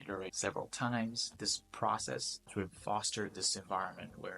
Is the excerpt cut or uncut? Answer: cut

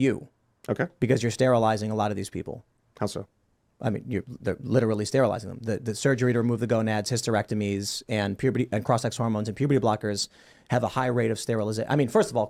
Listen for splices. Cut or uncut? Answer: uncut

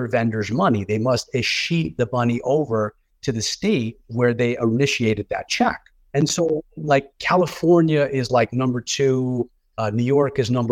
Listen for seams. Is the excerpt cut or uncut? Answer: uncut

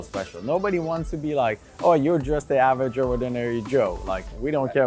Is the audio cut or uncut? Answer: uncut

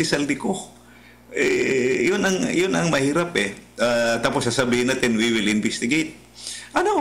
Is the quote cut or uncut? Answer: uncut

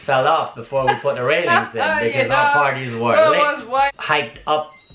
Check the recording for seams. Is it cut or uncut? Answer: cut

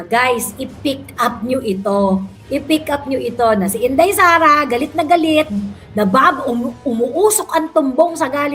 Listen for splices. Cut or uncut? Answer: uncut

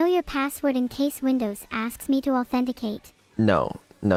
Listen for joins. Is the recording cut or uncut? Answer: uncut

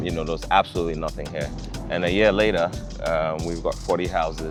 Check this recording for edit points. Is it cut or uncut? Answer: uncut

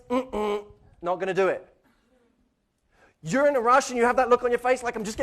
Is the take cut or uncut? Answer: cut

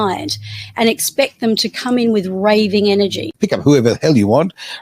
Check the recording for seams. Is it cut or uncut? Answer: cut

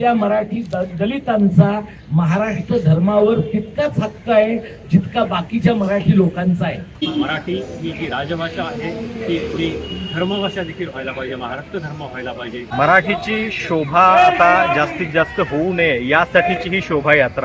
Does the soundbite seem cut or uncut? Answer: cut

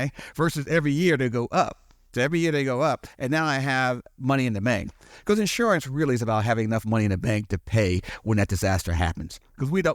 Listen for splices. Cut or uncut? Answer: uncut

